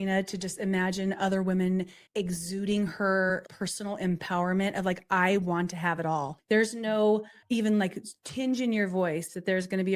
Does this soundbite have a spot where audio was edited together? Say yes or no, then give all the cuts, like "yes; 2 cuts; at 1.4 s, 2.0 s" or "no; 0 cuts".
yes; 4 cuts; at 2.0 s, 3.5 s, 6.3 s, 7.3 s